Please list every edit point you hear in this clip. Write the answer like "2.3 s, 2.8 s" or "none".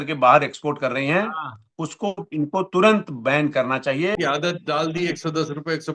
4.1 s